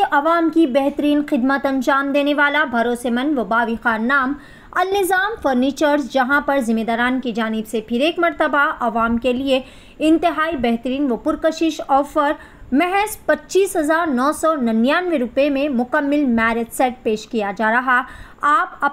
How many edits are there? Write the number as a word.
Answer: zero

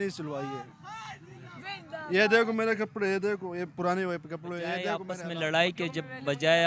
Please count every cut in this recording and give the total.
one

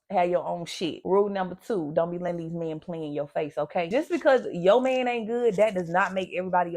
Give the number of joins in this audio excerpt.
one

